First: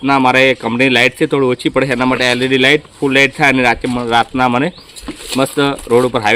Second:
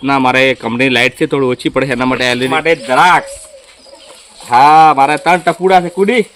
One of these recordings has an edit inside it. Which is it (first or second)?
second